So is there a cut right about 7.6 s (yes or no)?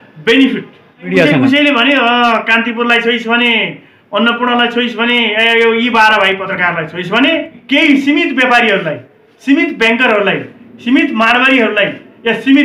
yes